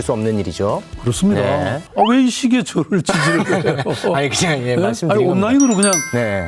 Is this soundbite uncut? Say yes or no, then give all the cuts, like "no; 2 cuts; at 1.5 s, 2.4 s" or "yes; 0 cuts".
yes; 0 cuts